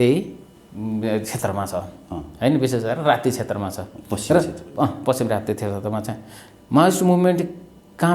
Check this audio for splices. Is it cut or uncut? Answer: uncut